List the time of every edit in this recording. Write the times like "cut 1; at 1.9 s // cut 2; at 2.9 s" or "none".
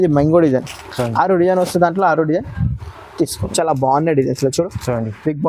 cut 1; at 3.5 s